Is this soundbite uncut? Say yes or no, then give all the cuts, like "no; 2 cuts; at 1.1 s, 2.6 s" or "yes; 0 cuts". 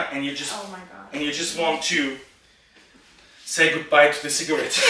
yes; 0 cuts